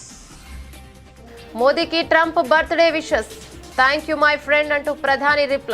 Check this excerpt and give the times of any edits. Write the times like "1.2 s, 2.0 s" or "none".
1.5 s